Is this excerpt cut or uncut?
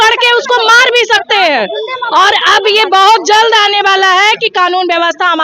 uncut